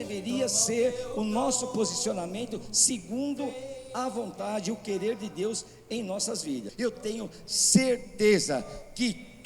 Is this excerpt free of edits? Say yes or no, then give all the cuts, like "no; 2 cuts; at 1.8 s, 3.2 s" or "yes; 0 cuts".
no; 1 cut; at 6.7 s